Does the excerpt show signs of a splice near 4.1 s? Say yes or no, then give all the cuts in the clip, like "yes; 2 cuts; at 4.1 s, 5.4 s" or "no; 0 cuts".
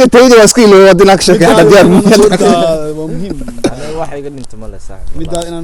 no; 0 cuts